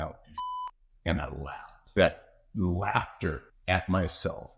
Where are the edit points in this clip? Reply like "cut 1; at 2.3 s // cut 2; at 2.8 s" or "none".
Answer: cut 1; at 1.9 s